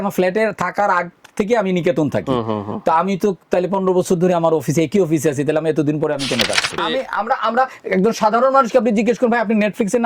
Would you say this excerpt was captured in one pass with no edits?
no; 1 cut; at 6.8 s

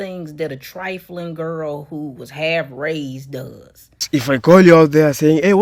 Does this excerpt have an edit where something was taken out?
yes; 1 cut; at 4.0 s

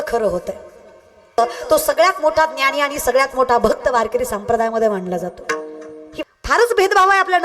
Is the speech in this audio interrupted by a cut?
yes; 2 cuts; at 1.4 s, 6.2 s

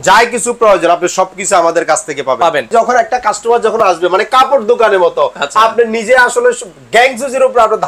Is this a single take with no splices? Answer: no; 1 cut; at 2.7 s

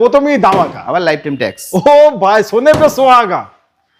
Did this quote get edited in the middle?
no; 0 cuts

